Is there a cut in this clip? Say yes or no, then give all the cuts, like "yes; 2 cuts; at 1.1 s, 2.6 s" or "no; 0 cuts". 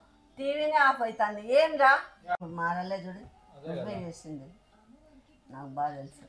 yes; 1 cut; at 2.3 s